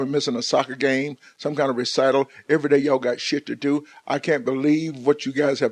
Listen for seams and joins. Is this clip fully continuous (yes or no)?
no